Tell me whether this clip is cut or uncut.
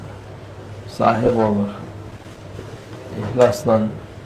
cut